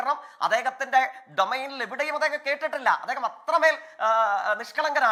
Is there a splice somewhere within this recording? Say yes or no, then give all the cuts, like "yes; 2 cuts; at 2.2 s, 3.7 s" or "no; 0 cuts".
no; 0 cuts